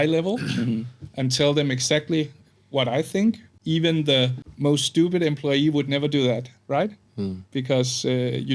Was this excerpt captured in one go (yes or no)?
no